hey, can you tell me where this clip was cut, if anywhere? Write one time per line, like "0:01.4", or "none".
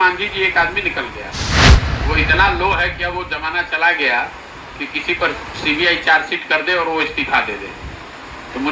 0:01.5